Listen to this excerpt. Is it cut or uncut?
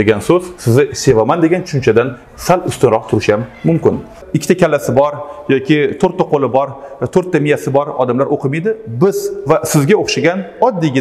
cut